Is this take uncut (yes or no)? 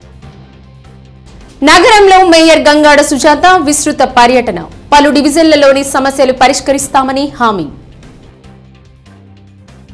yes